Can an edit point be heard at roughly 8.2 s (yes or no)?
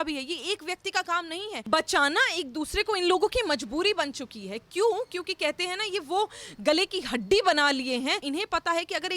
yes